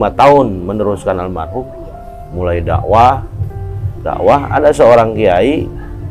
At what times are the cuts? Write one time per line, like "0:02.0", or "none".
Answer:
none